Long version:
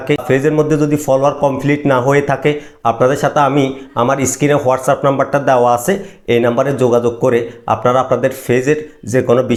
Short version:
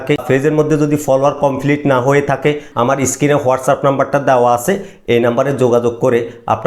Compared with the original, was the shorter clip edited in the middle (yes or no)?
yes